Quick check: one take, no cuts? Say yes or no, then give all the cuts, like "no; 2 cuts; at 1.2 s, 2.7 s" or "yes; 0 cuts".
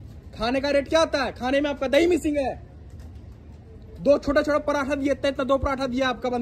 yes; 0 cuts